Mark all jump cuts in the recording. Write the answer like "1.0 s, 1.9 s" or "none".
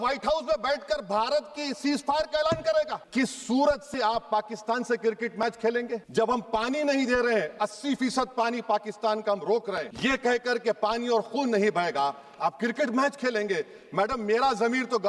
3.0 s